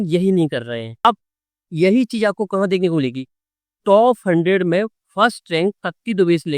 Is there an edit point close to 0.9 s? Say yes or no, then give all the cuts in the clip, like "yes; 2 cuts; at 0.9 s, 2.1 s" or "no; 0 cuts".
yes; 1 cut; at 0.9 s